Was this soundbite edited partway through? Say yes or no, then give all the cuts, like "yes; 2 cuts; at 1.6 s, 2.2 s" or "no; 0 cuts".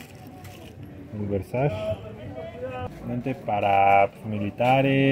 yes; 1 cut; at 2.8 s